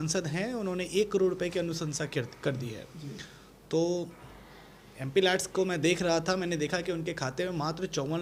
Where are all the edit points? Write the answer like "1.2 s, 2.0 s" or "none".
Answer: none